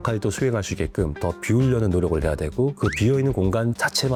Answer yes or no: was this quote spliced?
no